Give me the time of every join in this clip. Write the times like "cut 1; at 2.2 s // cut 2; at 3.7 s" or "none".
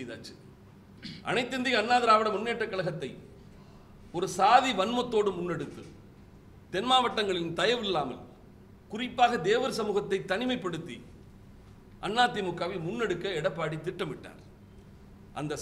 cut 1; at 1.0 s